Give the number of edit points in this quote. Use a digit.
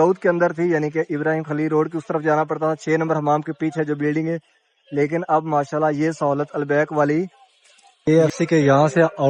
1